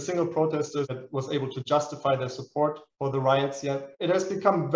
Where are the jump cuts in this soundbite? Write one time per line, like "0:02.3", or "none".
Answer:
0:00.9
0:03.9